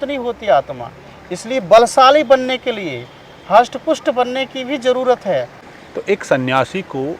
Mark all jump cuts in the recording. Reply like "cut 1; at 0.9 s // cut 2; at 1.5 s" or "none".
cut 1; at 5.6 s